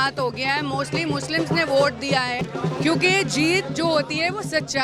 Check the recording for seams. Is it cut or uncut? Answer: cut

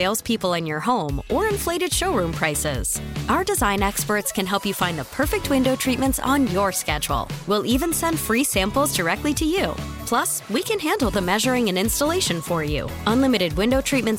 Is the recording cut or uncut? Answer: uncut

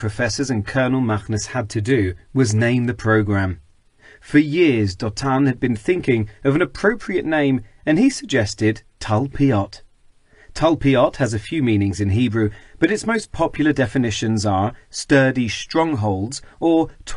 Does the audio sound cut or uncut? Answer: uncut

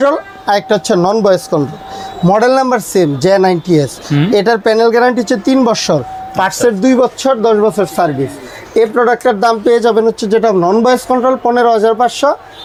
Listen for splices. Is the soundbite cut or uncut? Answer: uncut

